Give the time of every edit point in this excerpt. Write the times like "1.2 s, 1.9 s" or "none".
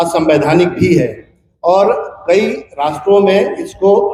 none